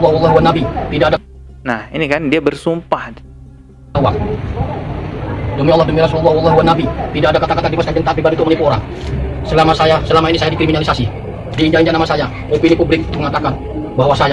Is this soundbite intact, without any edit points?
yes; 0 cuts

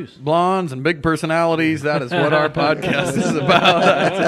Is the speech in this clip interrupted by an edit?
no; 0 cuts

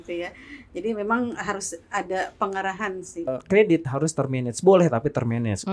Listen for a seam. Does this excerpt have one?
yes; 1 cut; at 3.3 s

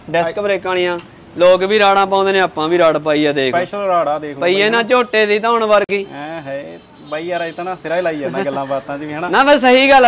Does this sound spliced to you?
no; 0 cuts

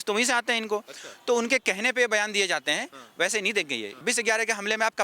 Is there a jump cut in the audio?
yes; 1 cut; at 4.0 s

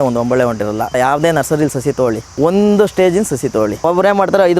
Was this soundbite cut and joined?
yes; 3 cuts; at 1.0 s, 2.3 s, 3.8 s

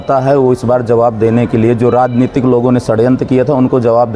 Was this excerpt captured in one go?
yes; 0 cuts

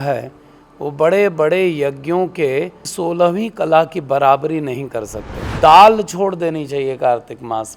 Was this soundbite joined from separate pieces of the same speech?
yes; 2 cuts; at 2.8 s, 5.5 s

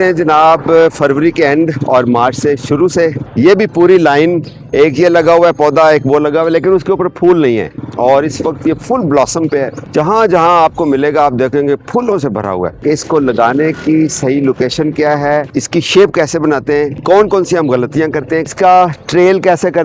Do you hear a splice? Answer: yes; 5 cuts; at 3.2 s, 7.8 s, 12.8 s, 15.5 s, 18.5 s

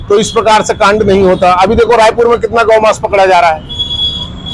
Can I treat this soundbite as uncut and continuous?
yes; 0 cuts

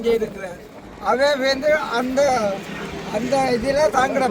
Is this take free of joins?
yes; 0 cuts

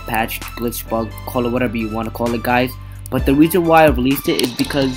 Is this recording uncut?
yes; 0 cuts

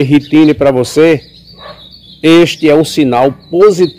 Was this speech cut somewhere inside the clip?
no; 0 cuts

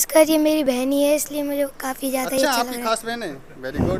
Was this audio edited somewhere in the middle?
no; 0 cuts

